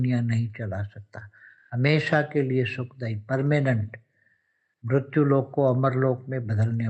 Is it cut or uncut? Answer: uncut